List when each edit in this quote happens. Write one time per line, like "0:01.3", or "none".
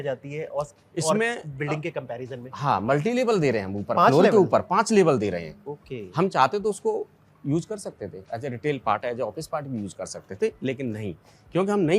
0:02.5